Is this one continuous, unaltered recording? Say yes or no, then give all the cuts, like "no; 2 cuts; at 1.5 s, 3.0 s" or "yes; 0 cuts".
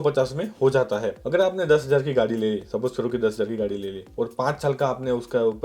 no; 1 cut; at 1.2 s